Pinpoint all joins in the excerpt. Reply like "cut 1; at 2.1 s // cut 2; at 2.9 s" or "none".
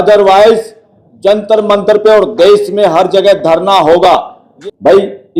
cut 1; at 4.4 s